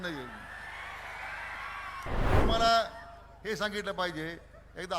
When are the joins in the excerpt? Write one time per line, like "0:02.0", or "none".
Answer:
0:02.4